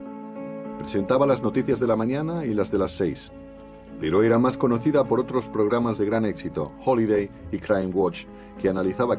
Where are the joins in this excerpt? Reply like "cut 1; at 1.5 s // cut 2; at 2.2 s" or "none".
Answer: cut 1; at 5.0 s